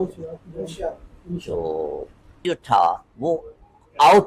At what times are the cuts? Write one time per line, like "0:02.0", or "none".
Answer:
0:02.4